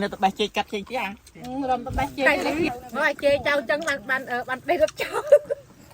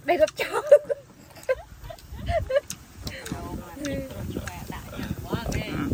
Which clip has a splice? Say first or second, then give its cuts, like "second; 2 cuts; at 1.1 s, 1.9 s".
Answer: first; 1 cut; at 2.8 s